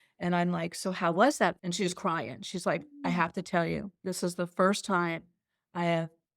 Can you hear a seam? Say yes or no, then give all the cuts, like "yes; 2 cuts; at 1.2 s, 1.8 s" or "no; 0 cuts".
yes; 1 cut; at 1.6 s